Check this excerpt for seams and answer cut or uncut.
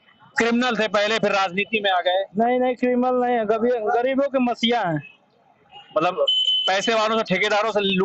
uncut